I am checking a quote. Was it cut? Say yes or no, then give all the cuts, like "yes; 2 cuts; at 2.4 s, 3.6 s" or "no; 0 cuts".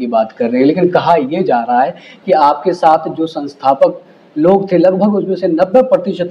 no; 0 cuts